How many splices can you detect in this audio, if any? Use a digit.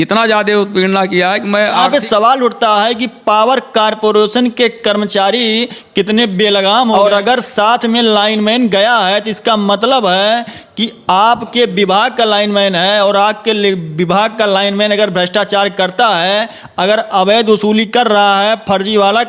2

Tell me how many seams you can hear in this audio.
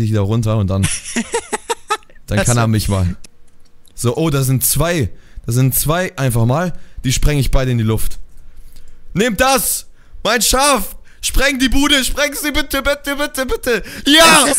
1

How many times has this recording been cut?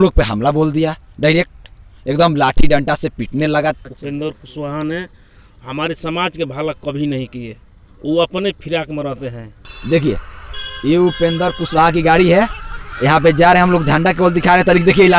2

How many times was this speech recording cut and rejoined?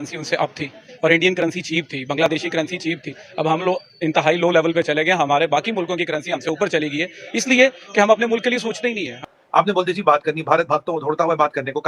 1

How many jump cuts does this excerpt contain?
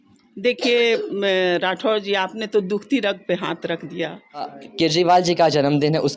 1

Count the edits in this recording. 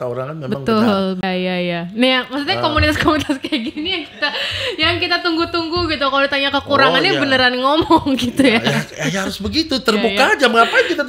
1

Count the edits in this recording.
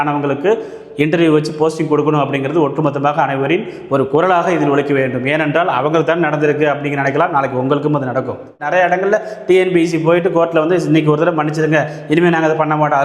1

